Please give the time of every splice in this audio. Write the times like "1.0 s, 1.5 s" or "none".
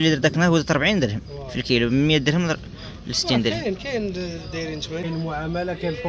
5.0 s

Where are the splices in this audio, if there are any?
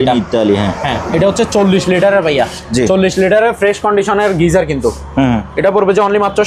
none

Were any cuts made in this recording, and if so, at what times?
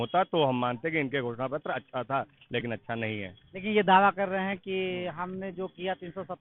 none

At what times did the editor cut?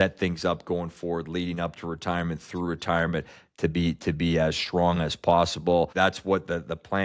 5.9 s

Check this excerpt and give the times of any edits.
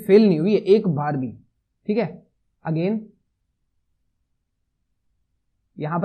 none

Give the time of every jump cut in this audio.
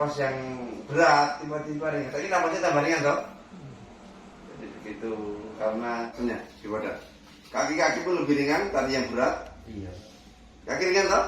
6.1 s

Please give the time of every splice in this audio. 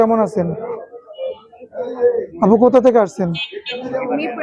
none

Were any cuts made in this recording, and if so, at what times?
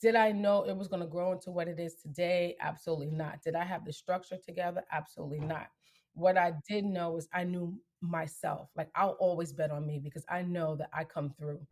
none

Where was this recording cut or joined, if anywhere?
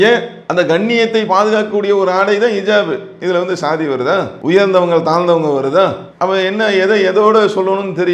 4.3 s

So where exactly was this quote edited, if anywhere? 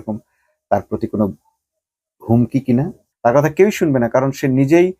3.0 s

